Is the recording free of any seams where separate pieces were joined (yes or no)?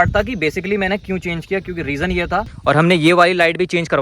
no